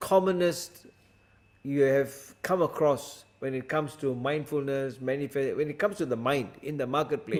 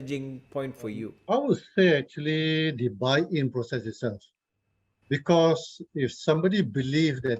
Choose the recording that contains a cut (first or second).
second